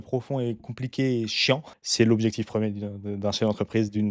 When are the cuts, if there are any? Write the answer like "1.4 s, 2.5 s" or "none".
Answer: 1.7 s